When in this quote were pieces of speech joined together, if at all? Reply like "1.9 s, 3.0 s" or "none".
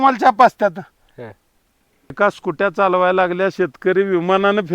2.2 s